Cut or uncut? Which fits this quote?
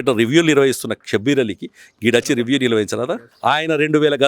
cut